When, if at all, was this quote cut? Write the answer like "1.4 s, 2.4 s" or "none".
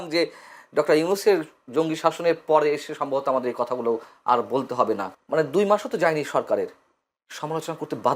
5.1 s